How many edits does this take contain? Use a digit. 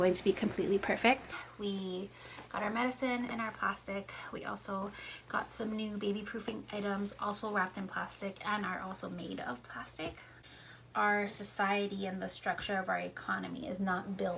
2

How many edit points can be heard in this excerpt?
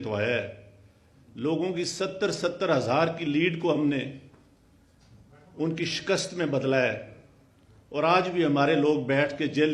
0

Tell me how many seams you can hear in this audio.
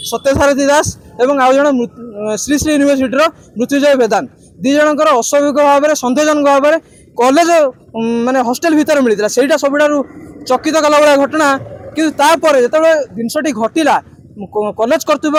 0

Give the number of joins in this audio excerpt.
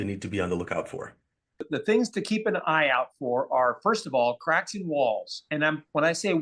1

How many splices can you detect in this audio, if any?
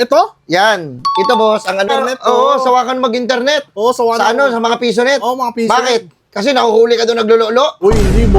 1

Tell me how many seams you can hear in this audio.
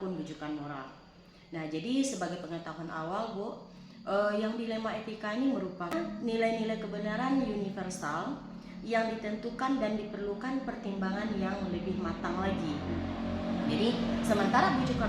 1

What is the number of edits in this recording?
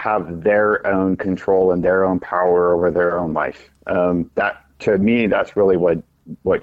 0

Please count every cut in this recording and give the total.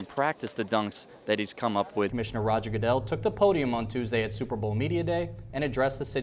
1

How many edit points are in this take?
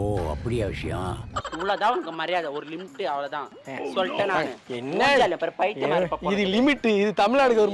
1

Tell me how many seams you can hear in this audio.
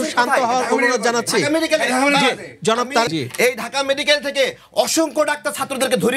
1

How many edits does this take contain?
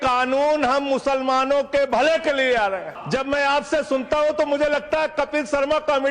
1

